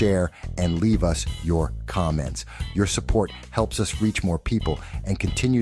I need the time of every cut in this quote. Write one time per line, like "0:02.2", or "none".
0:01.3